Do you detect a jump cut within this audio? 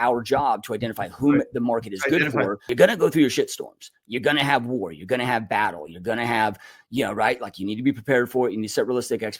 yes; 1 cut; at 2.7 s

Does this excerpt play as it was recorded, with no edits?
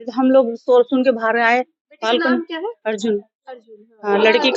yes; 0 cuts

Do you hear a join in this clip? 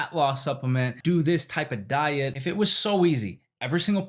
yes; 2 cuts; at 1.0 s, 2.4 s

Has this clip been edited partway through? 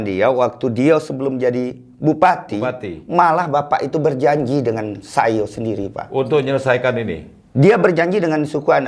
no; 0 cuts

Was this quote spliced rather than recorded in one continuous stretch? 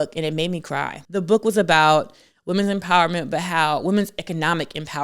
yes; 1 cut; at 1.0 s

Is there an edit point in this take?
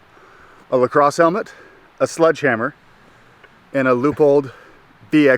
no; 0 cuts

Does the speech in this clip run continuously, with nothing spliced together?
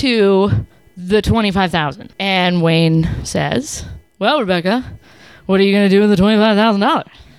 yes; 0 cuts

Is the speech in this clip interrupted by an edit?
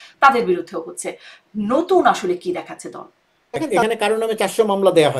yes; 1 cut; at 3.8 s

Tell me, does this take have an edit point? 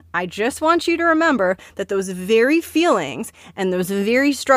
no; 0 cuts

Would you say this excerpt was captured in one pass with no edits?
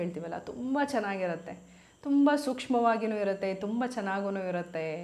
yes; 0 cuts

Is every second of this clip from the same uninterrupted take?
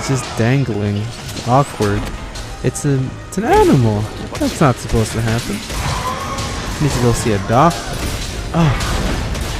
yes; 0 cuts

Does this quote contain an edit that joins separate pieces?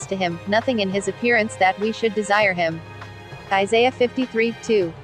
no; 0 cuts

